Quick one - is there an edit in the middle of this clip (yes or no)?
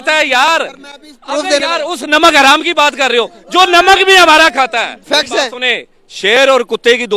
yes